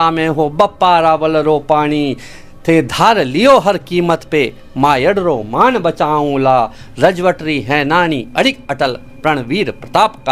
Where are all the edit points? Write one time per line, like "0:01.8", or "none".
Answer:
none